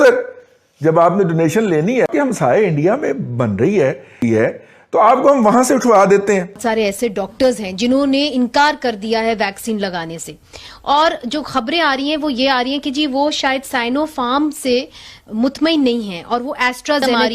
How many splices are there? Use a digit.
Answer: 3